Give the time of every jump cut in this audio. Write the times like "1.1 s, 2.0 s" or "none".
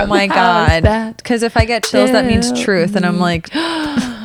none